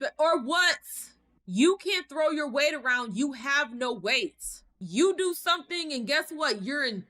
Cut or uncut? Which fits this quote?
cut